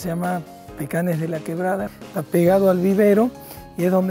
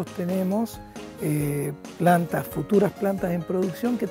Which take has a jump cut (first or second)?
first